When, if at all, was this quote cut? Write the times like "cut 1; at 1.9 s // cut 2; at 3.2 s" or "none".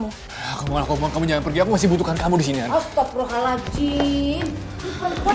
cut 1; at 2.6 s